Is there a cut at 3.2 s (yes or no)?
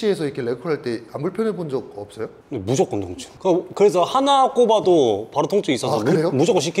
yes